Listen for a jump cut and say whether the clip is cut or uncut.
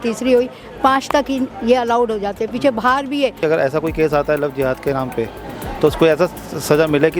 cut